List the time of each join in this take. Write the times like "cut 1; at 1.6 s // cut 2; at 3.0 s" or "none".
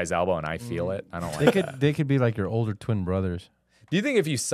none